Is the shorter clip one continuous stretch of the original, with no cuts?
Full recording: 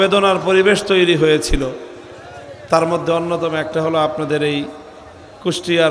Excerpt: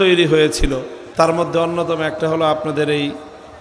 no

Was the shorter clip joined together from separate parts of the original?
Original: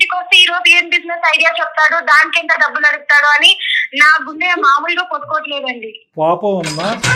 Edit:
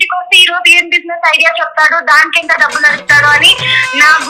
no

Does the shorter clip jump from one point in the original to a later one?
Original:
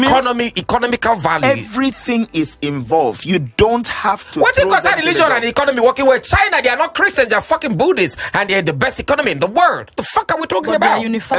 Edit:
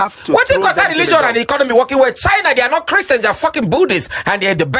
no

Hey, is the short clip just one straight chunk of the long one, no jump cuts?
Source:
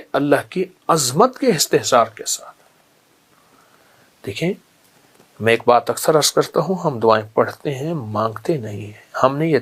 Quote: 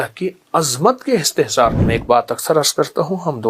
no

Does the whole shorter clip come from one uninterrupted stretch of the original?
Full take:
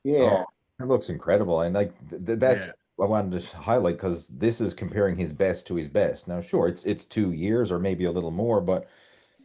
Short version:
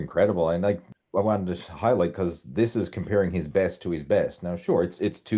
no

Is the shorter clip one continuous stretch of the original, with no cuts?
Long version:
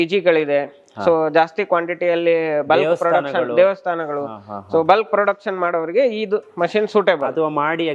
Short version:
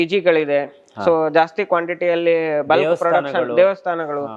yes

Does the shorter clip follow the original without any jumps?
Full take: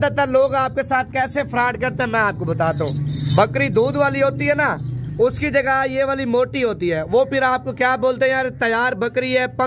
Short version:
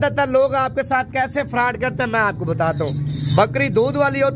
yes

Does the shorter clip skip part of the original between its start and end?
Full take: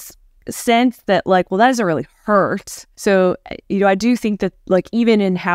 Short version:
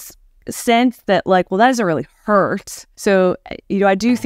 no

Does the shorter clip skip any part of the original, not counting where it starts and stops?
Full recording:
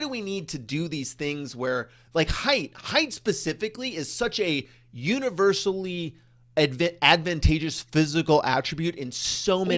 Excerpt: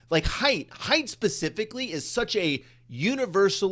no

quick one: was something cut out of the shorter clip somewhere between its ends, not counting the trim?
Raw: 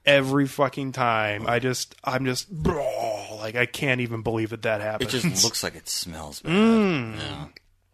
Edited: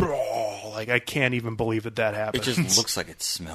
no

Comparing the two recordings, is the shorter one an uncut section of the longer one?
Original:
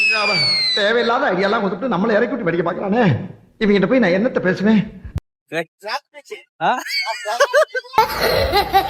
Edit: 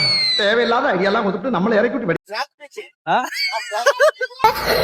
no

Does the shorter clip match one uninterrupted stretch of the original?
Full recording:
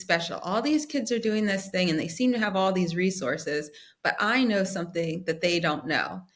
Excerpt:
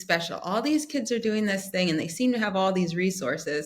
yes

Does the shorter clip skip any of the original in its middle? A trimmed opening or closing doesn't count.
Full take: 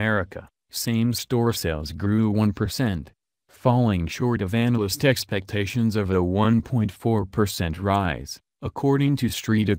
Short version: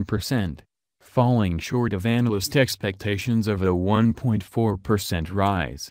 no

